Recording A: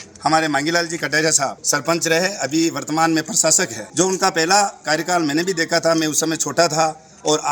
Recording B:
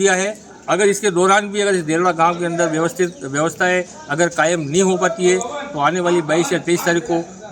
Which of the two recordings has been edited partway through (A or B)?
A